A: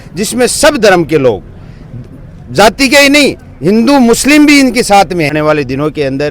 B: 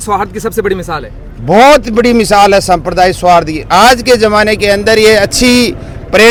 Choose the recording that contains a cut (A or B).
A